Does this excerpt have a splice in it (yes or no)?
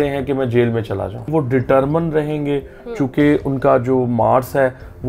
yes